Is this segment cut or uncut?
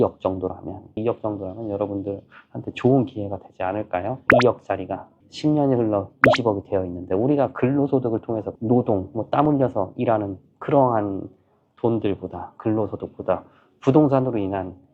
cut